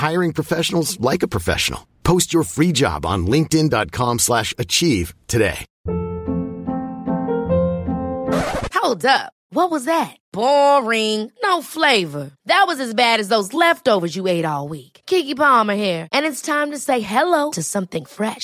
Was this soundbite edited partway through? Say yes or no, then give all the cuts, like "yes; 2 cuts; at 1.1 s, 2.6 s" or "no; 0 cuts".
yes; 1 cut; at 5.7 s